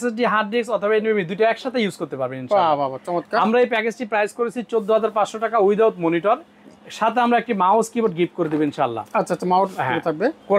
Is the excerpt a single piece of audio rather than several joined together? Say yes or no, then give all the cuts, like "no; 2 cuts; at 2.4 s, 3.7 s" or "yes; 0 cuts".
yes; 0 cuts